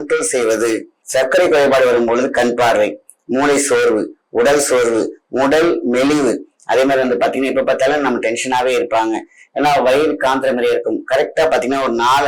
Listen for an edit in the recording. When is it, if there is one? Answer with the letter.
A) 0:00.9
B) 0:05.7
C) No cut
A